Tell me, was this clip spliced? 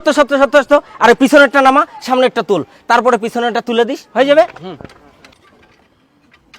no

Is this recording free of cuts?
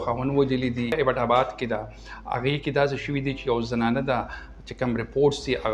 no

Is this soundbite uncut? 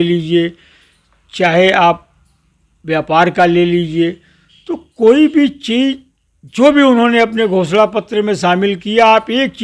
yes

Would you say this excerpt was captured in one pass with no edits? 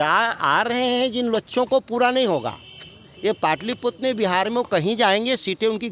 yes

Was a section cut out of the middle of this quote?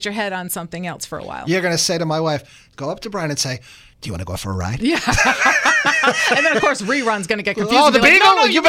no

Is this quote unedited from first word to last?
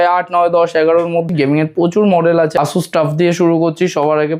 no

